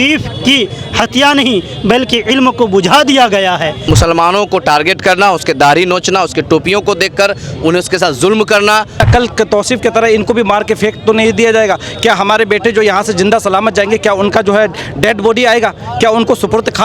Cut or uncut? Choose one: cut